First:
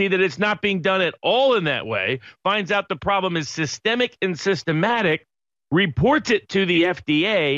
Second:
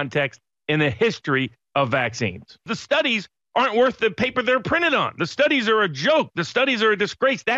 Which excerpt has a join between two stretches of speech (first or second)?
second